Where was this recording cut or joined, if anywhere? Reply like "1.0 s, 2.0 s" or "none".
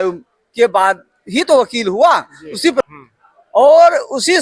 2.9 s